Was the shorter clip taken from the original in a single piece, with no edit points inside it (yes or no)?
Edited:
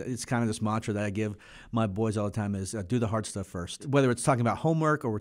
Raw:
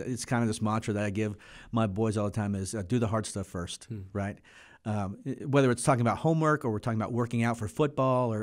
no